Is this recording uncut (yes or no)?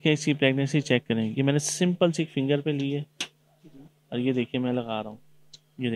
yes